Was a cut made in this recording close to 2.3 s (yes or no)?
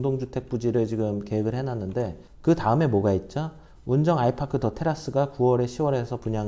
yes